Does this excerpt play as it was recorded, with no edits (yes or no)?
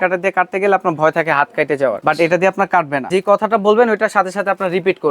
no